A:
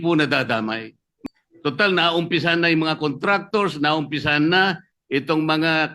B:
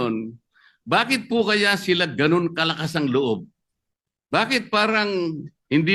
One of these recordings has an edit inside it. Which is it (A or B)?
A